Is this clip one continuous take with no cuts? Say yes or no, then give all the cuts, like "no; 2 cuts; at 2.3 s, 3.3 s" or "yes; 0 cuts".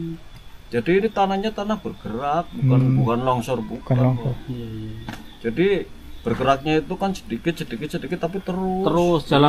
yes; 0 cuts